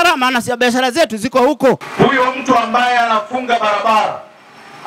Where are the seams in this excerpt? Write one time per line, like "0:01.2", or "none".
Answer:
0:01.9